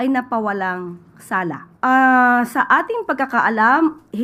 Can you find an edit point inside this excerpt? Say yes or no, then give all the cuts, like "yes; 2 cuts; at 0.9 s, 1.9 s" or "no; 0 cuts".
yes; 1 cut; at 1.7 s